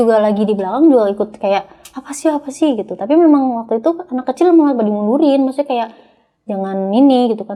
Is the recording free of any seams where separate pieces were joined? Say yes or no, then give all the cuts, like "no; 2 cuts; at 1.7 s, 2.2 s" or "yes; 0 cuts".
yes; 0 cuts